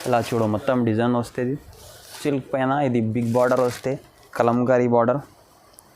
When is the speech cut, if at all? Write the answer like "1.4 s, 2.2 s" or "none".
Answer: 2.2 s